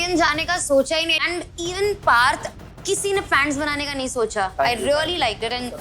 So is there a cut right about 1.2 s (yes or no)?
yes